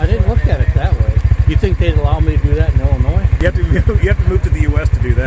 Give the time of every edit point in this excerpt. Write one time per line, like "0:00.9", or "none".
0:01.3
0:03.3